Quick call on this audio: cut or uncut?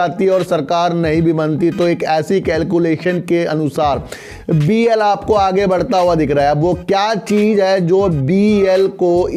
uncut